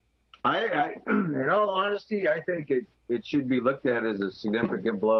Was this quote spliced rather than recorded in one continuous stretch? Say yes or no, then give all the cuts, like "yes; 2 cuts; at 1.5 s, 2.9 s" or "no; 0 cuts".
yes; 1 cut; at 1.9 s